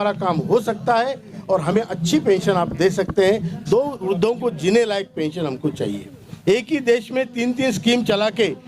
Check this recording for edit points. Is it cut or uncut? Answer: cut